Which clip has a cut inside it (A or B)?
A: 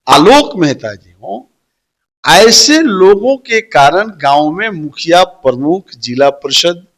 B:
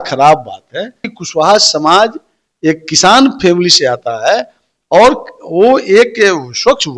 B